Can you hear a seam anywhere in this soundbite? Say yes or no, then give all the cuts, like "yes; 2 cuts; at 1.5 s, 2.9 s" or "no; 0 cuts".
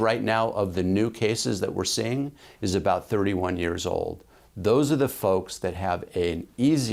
no; 0 cuts